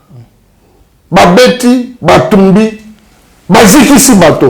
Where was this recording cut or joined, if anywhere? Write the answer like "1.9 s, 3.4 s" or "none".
none